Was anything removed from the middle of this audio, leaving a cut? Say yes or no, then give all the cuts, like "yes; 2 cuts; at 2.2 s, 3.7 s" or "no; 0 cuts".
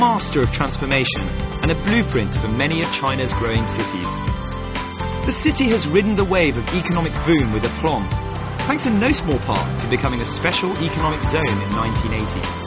yes; 1 cut; at 7.2 s